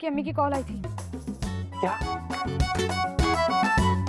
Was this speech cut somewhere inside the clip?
no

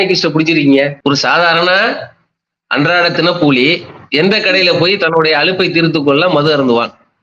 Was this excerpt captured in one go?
no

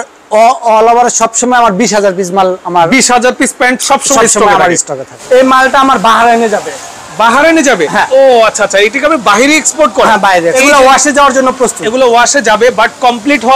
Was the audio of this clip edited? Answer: yes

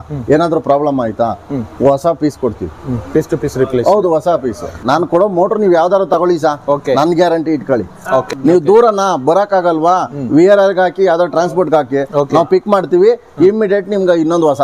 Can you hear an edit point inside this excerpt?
yes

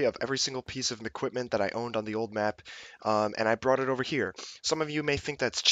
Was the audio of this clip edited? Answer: yes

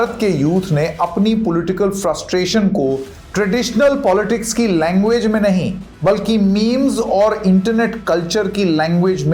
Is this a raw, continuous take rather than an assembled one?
yes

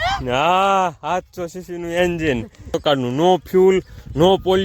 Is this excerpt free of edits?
no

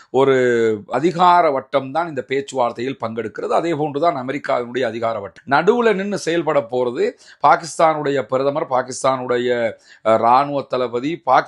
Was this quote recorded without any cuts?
no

